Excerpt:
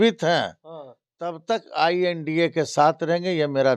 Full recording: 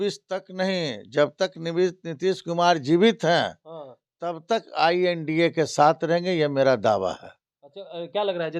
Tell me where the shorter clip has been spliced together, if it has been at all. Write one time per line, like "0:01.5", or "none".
none